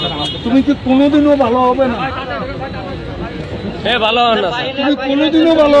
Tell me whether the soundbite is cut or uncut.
uncut